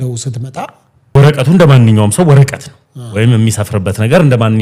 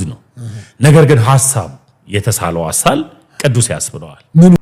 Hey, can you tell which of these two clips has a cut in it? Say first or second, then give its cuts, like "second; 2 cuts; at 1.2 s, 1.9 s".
first; 1 cut; at 1.2 s